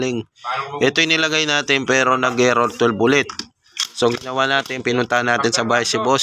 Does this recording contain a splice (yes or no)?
no